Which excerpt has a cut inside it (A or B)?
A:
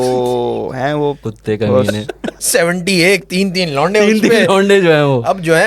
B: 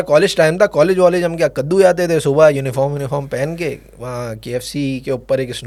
A